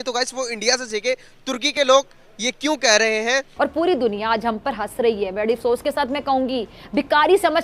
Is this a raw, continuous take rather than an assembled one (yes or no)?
no